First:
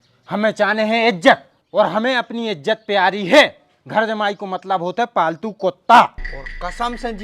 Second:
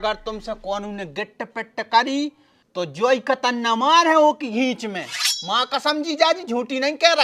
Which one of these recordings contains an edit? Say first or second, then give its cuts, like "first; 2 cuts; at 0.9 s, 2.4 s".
first; 1 cut; at 6.2 s